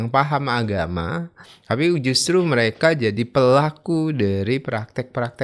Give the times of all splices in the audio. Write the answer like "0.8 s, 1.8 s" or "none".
none